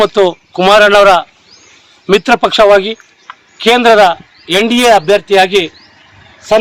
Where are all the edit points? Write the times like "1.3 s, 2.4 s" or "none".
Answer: none